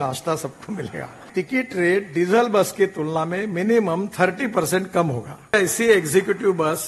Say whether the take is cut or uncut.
cut